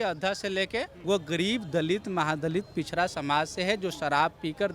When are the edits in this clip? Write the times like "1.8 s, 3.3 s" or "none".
0.9 s

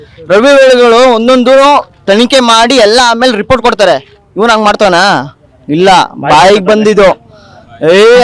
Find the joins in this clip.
none

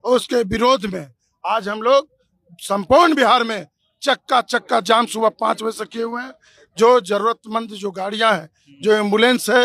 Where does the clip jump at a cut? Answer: none

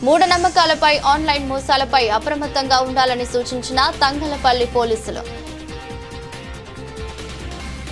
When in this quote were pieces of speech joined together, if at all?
none

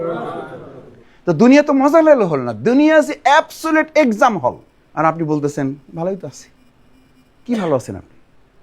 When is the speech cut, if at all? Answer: 1.0 s, 4.6 s

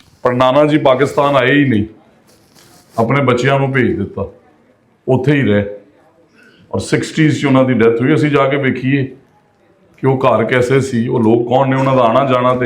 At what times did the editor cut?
none

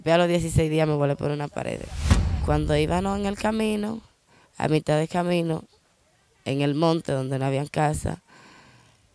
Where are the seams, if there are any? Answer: 2.4 s

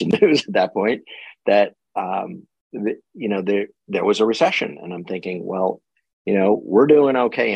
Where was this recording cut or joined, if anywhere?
none

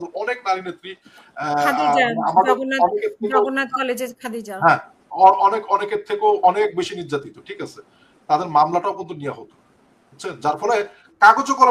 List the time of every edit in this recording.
none

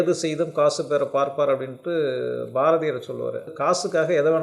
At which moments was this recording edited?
3.5 s

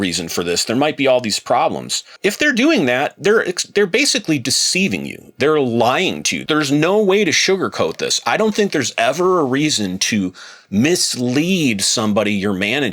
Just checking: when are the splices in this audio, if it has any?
2.1 s, 6.3 s

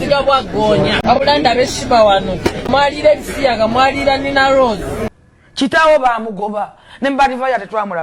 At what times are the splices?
1.0 s, 2.7 s, 5.1 s

